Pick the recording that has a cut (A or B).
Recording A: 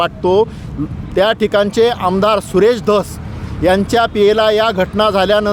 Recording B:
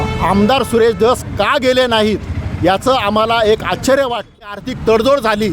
B